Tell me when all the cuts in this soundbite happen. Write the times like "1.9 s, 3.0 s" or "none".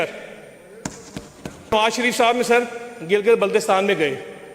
1.7 s